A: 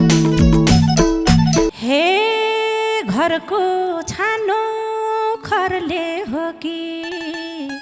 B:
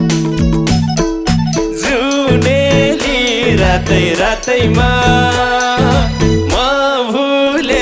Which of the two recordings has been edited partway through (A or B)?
A